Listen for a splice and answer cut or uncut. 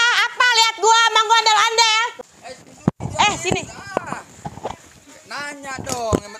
cut